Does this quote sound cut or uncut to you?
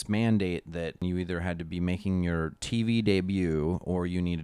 cut